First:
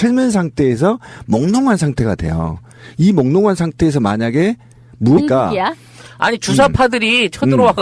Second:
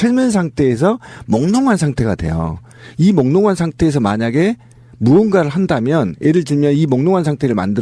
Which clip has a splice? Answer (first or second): second